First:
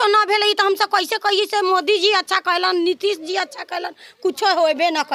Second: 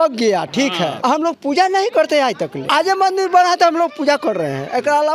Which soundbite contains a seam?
second; 2 cuts; at 1.0 s, 2.5 s

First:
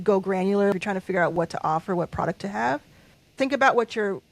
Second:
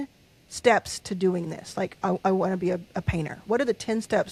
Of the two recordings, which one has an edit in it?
first; 2 cuts; at 0.7 s, 3.2 s

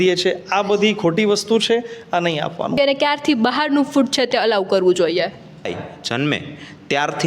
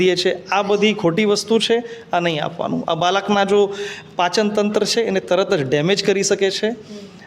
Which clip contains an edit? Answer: first; 2 cuts; at 2.8 s, 5.7 s

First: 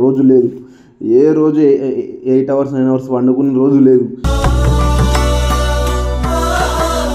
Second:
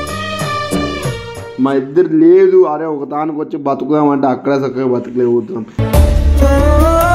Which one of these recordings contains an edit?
second; 1 cut; at 1.4 s

